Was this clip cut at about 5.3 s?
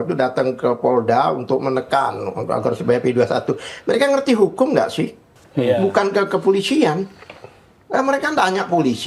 yes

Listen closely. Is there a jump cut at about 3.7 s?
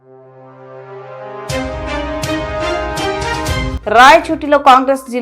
yes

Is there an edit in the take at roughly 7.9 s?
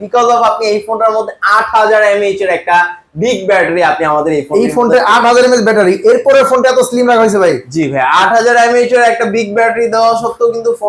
no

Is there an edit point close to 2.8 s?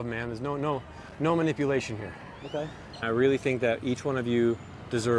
yes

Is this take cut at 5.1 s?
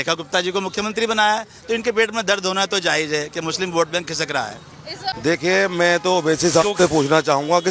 yes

